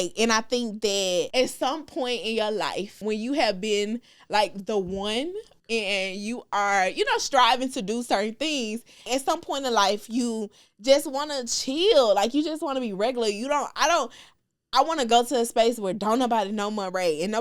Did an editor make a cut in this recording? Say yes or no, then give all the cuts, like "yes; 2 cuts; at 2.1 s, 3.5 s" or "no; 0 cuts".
yes; 4 cuts; at 1.3 s, 3.0 s, 5.5 s, 9.1 s